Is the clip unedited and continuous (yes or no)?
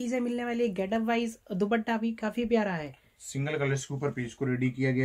yes